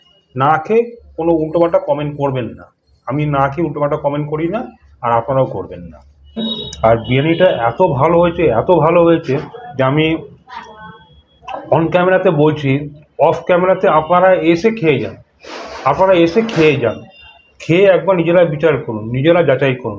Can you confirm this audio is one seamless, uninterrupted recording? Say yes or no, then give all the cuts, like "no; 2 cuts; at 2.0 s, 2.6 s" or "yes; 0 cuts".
no; 1 cut; at 6.4 s